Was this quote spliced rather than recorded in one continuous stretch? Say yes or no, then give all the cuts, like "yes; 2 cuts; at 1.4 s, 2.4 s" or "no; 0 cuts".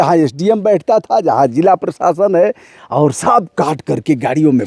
no; 0 cuts